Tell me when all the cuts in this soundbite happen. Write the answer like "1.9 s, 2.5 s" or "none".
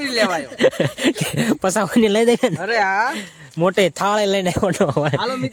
none

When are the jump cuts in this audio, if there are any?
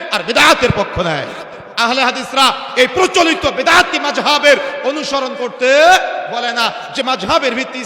1.7 s

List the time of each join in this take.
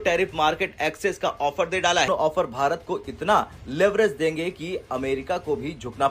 2.1 s

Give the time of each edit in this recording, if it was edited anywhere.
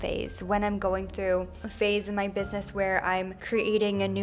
1.6 s, 3.4 s

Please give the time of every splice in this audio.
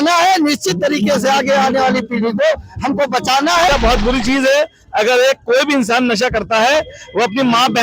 3.6 s

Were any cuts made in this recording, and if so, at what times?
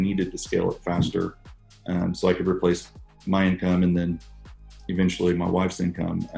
none

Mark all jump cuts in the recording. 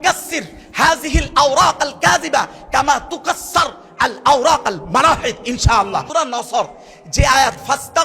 6.1 s

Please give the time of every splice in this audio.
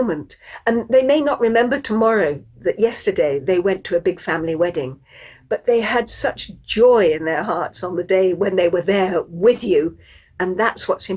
none

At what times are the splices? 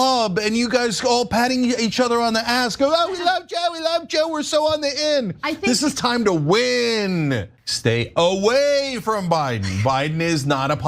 7.6 s

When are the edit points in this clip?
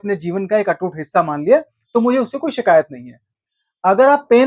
none

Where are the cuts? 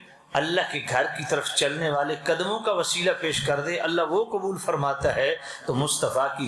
none

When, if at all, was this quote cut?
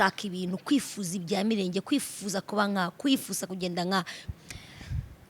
4.2 s

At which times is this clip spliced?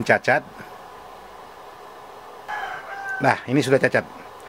2.5 s

